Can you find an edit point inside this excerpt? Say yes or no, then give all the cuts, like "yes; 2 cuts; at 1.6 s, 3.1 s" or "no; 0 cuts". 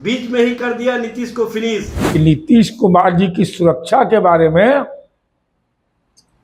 yes; 1 cut; at 1.9 s